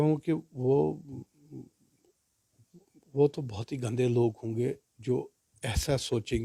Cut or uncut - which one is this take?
uncut